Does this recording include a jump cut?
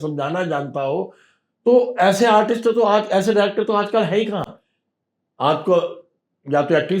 no; 0 cuts

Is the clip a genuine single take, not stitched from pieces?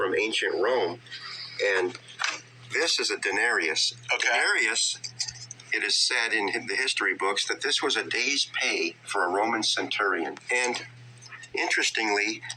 no; 1 cut; at 7.6 s

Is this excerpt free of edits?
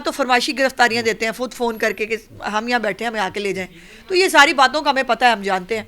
yes; 0 cuts

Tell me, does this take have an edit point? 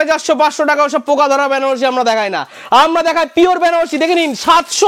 no; 0 cuts

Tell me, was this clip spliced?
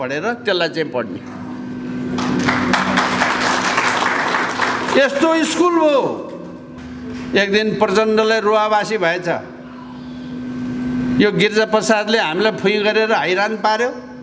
no; 0 cuts

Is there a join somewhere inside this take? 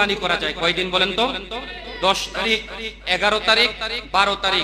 no; 0 cuts

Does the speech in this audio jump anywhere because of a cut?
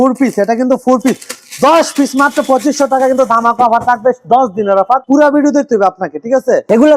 no; 0 cuts

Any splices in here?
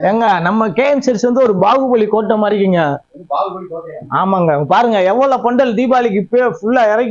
no; 0 cuts

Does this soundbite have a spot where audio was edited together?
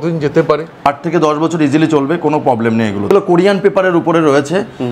yes; 2 cuts; at 0.8 s, 3.1 s

